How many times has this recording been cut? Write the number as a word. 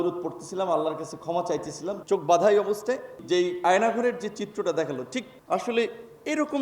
two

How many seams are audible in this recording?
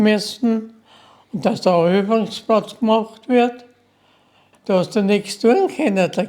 one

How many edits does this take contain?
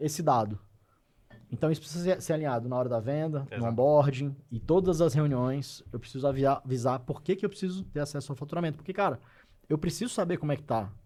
zero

